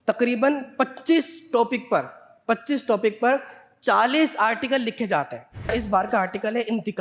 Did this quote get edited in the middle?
yes; 1 cut; at 5.7 s

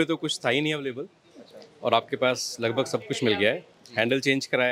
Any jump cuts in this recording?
no; 0 cuts

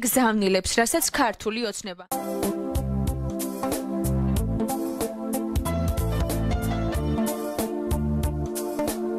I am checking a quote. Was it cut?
no; 0 cuts

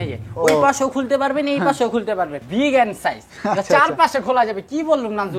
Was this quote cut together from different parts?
yes; 1 cut; at 2.4 s

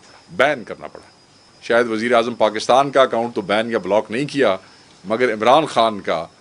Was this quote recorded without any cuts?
no; 1 cut; at 1.5 s

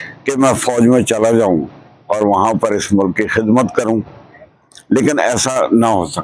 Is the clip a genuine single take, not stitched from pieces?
yes; 0 cuts

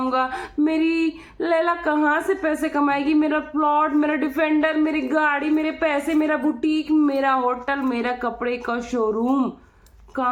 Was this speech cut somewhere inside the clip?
no; 0 cuts

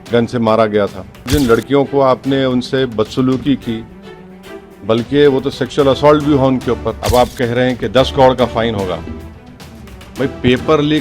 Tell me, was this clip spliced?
yes; 2 cuts; at 1.2 s, 7.0 s

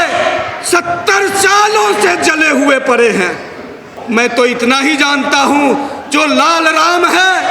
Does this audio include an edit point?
yes; 1 cut; at 3.9 s

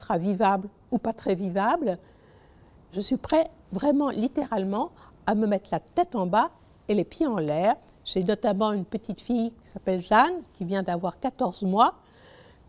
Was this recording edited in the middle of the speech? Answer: no; 0 cuts

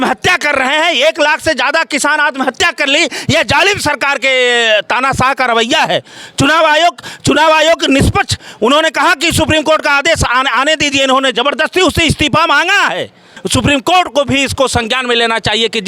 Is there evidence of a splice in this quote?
yes; 1 cut; at 13.3 s

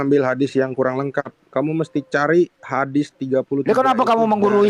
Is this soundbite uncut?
yes; 0 cuts

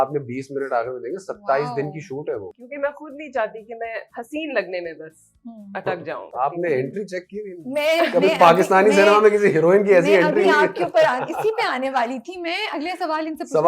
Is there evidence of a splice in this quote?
yes; 3 cuts; at 2.6 s, 4.1 s, 6.3 s

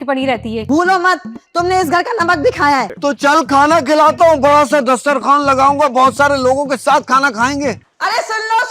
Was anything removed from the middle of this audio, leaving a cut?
yes; 2 cuts; at 2.9 s, 7.8 s

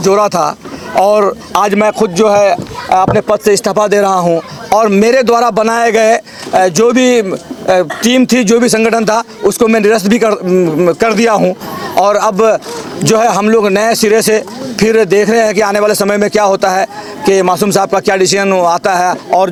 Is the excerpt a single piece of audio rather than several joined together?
yes; 0 cuts

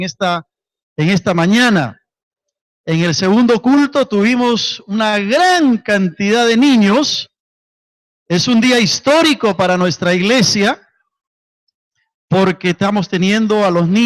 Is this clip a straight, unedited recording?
yes; 0 cuts

